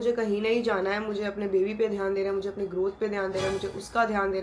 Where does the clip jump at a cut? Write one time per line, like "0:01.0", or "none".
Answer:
none